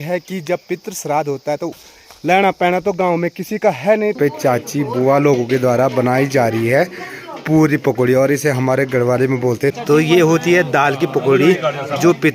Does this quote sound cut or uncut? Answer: cut